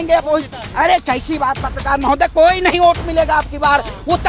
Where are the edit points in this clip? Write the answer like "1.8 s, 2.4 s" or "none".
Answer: none